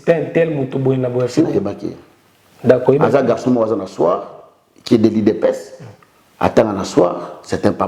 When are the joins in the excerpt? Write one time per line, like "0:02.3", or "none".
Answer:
none